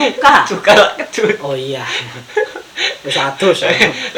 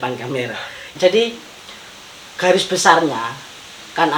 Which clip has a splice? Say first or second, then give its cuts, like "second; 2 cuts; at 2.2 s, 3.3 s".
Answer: second; 1 cut; at 0.9 s